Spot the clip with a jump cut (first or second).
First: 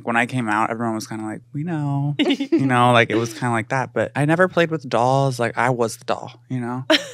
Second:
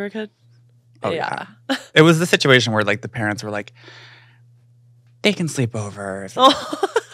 first